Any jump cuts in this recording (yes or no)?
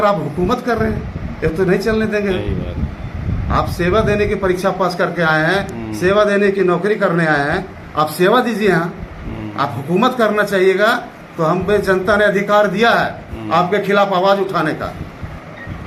no